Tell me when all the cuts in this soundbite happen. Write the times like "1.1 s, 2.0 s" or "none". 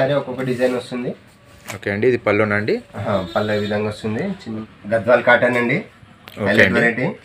4.5 s